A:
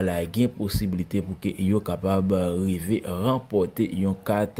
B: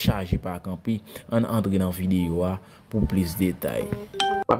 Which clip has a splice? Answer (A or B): A